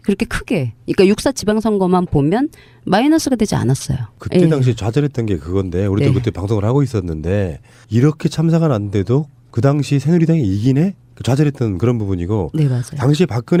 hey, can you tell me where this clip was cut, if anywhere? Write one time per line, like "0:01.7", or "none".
none